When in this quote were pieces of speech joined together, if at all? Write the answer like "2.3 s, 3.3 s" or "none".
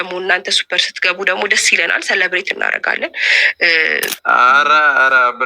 4.2 s